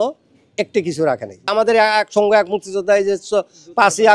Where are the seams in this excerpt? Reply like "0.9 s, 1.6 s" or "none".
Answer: 1.5 s